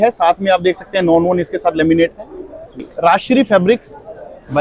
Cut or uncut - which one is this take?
cut